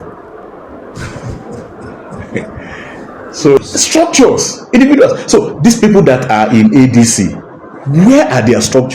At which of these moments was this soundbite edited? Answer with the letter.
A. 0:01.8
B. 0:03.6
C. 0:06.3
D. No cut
B